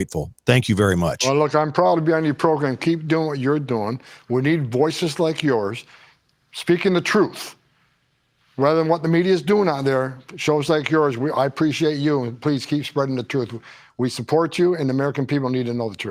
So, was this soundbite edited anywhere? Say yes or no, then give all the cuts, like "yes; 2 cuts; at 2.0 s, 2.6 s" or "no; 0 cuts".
no; 0 cuts